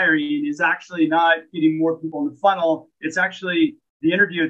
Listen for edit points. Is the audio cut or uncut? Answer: cut